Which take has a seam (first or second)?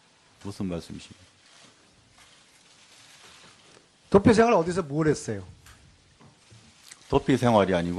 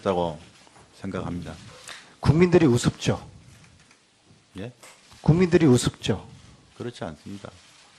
first